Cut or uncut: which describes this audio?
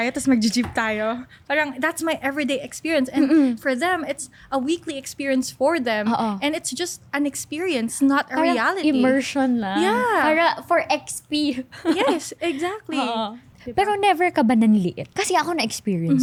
uncut